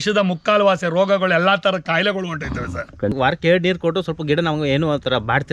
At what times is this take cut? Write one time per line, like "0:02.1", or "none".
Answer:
0:03.1